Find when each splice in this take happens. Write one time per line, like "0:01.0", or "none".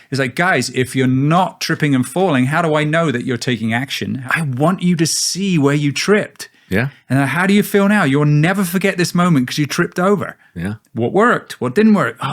0:04.2